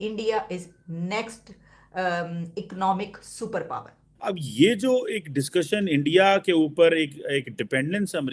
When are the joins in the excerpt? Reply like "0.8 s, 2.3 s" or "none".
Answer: 4.1 s